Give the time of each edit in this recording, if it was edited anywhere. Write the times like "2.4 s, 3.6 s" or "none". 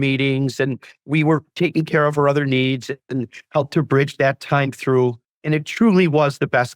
5.3 s